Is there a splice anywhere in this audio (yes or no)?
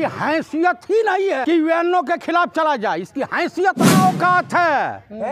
yes